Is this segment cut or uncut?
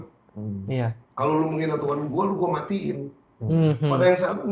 uncut